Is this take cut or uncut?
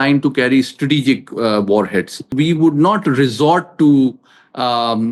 cut